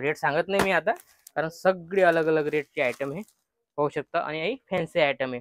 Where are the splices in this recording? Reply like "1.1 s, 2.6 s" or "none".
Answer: none